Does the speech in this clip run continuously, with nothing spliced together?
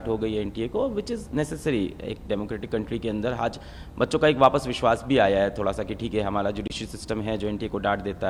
yes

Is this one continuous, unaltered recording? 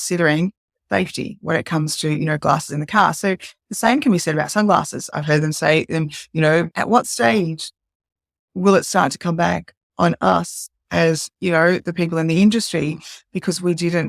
no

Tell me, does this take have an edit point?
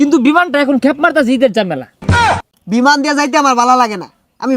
yes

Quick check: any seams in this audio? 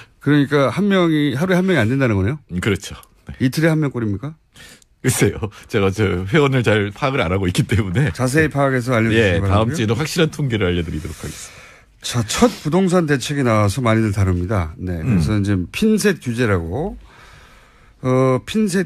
no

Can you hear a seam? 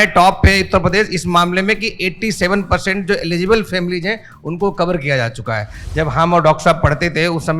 yes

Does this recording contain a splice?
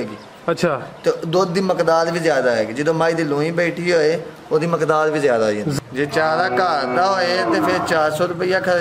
yes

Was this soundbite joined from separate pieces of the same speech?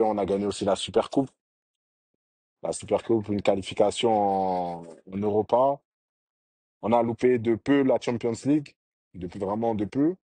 no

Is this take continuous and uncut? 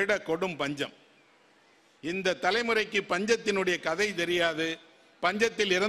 yes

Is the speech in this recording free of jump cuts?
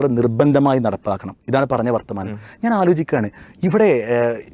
yes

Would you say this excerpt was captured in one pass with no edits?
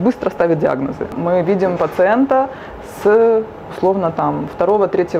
no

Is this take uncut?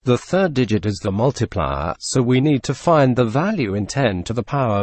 no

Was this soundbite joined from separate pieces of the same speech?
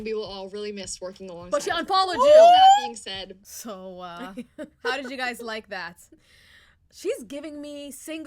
no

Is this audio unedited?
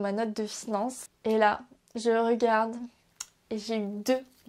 no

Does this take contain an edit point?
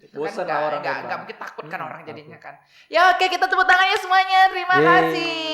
no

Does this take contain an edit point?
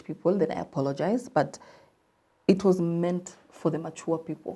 no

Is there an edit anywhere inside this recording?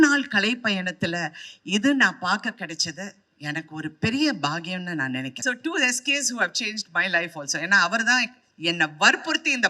yes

